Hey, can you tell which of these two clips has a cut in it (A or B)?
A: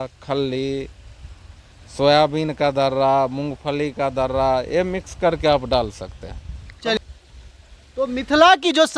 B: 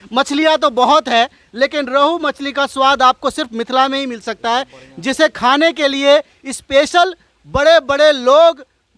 A